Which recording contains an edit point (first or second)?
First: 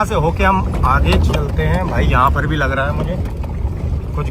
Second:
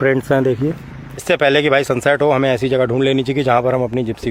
second